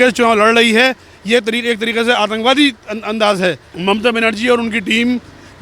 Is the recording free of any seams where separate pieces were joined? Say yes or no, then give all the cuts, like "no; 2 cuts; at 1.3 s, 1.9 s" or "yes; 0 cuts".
no; 1 cut; at 3.7 s